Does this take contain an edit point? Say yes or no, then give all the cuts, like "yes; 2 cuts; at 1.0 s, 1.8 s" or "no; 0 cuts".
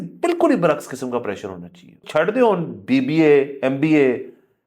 yes; 1 cut; at 2.0 s